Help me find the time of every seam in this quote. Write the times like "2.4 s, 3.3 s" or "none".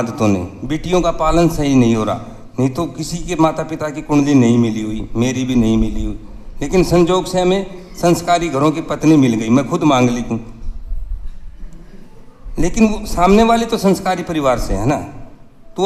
none